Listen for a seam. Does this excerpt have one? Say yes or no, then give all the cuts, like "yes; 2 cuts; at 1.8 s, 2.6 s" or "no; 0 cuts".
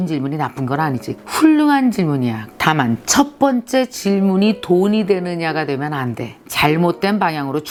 no; 0 cuts